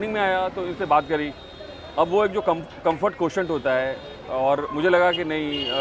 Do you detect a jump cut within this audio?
no; 0 cuts

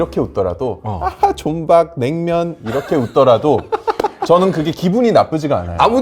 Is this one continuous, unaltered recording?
yes; 0 cuts

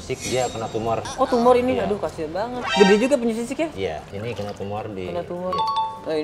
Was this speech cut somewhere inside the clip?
no; 0 cuts

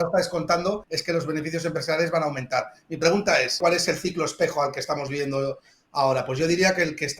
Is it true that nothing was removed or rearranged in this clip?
no; 2 cuts; at 0.9 s, 3.6 s

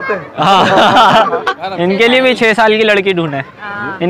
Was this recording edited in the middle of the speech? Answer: yes; 1 cut; at 1.5 s

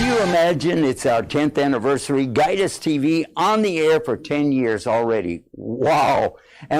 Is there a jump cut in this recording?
yes; 1 cut; at 1.3 s

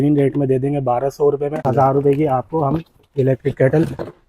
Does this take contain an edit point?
yes; 1 cut; at 1.7 s

